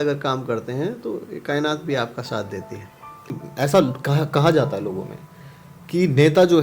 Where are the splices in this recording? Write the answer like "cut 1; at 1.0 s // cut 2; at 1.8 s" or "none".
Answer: cut 1; at 3.4 s